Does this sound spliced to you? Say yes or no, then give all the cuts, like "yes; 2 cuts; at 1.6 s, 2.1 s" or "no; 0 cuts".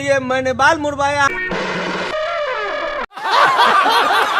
yes; 1 cut; at 3.1 s